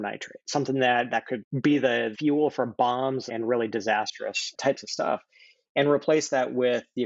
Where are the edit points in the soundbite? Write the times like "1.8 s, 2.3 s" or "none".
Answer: 2.1 s, 3.3 s